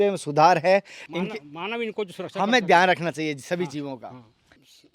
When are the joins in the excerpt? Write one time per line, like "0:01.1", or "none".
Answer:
0:01.0